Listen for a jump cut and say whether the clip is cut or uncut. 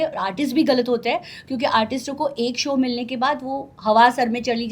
uncut